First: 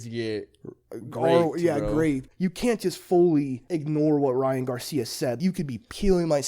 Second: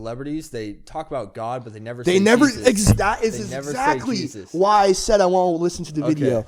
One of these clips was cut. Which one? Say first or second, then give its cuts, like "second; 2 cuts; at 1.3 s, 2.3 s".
first; 3 cuts; at 2.2 s, 3.6 s, 5.4 s